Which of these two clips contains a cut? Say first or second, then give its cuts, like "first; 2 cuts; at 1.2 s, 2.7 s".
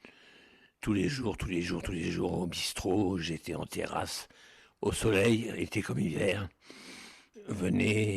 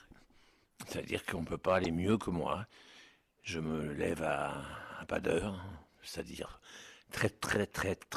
first; 1 cut; at 1.1 s